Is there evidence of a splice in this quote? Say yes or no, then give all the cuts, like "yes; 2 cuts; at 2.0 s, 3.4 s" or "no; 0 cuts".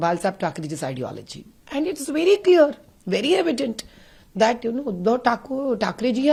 no; 0 cuts